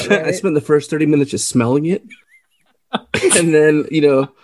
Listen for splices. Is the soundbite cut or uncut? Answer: uncut